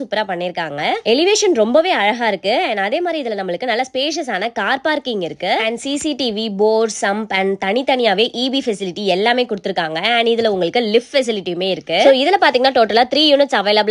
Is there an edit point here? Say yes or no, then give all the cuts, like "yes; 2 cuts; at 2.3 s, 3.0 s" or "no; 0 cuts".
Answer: no; 0 cuts